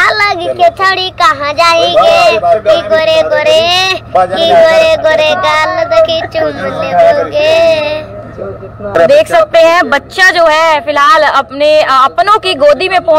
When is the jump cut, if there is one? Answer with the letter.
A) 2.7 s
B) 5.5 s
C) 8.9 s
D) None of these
C